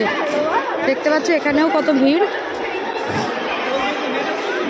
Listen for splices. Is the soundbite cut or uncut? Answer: uncut